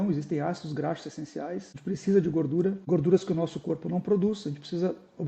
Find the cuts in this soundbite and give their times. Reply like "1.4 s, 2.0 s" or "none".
1.7 s, 2.8 s